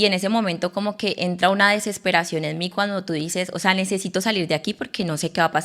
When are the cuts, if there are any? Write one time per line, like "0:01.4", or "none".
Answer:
none